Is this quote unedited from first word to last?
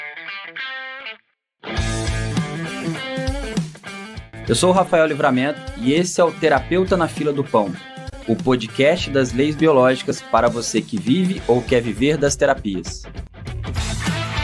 yes; 0 cuts

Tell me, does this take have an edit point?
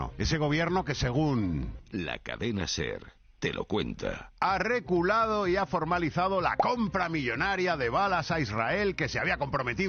no; 0 cuts

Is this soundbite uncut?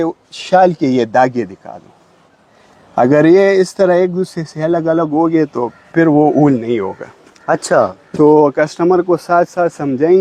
yes; 0 cuts

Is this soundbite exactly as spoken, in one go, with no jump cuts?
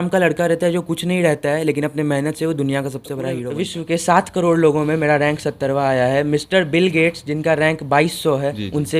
no; 1 cut; at 3.4 s

